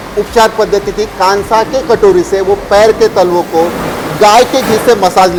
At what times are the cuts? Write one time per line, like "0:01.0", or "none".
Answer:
none